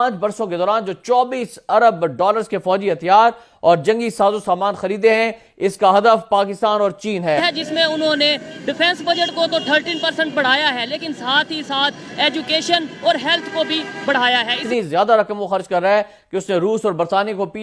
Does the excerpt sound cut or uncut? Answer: cut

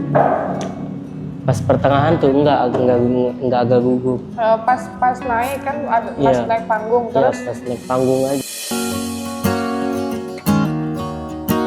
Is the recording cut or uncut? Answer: uncut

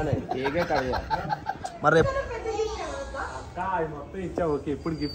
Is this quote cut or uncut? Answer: cut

